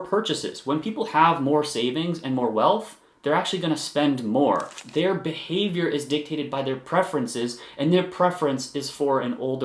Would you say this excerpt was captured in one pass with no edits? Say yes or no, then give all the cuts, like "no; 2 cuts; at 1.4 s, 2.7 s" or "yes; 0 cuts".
no; 1 cut; at 4.8 s